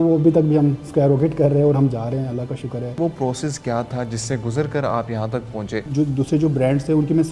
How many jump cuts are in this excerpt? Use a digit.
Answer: 2